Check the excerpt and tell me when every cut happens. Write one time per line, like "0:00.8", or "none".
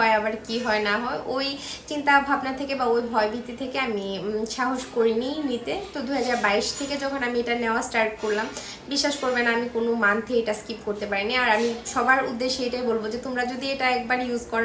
none